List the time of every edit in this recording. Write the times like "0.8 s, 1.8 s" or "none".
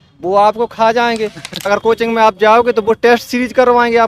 1.6 s